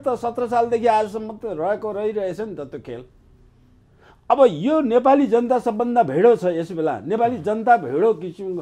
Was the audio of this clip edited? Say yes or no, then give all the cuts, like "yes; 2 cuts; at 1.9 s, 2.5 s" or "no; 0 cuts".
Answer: no; 0 cuts